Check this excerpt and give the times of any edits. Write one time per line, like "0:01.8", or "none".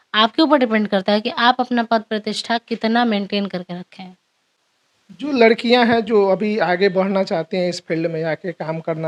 none